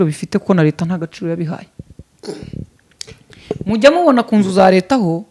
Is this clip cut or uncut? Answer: uncut